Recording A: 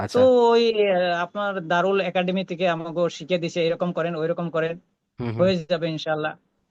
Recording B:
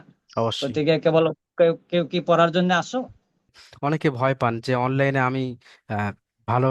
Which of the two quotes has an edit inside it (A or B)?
B